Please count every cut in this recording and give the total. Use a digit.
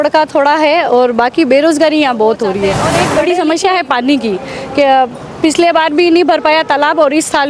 1